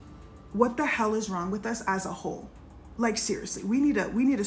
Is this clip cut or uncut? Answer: uncut